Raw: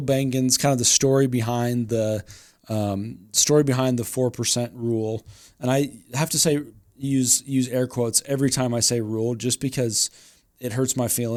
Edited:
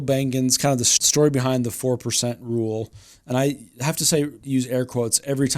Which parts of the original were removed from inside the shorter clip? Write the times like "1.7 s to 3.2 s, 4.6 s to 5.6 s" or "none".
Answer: 0.9 s to 3.2 s, 6.7 s to 7.4 s